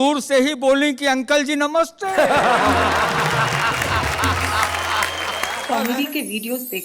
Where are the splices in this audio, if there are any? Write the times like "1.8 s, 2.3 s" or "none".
5.6 s